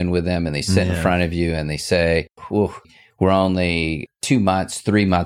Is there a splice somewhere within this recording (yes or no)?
yes